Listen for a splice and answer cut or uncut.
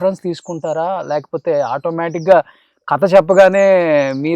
uncut